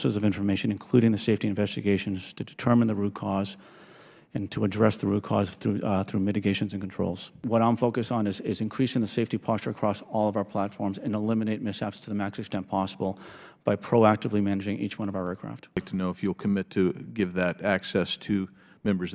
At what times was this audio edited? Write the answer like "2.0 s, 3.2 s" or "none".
7.4 s, 15.6 s

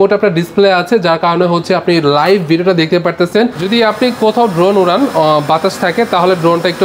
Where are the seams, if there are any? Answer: 3.7 s

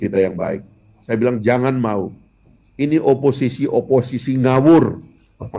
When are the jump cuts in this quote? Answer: 1.0 s

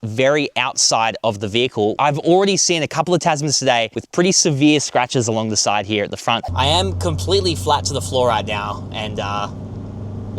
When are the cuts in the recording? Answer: 2.0 s, 6.4 s

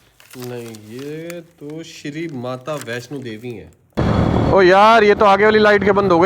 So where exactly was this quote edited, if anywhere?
4.0 s

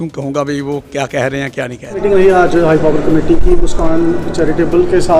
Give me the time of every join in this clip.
none

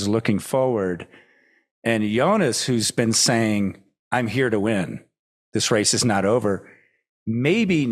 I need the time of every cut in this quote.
none

